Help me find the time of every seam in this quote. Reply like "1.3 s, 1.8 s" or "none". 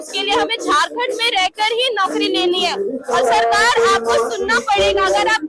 none